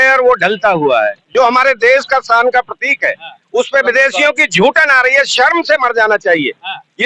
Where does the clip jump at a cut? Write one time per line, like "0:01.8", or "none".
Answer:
0:01.2